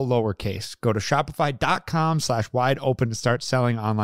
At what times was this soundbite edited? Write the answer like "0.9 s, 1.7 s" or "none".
none

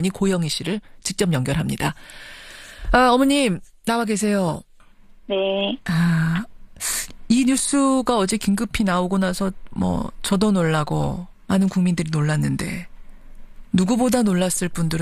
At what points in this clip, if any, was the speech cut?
6.6 s

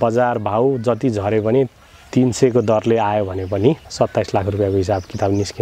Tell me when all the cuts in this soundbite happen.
3.9 s

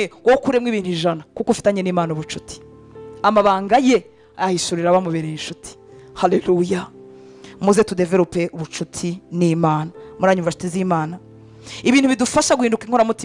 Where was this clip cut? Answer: 11.6 s

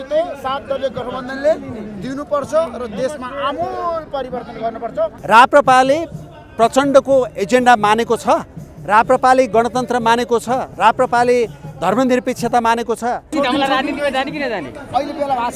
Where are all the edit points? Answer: 5.2 s, 13.3 s

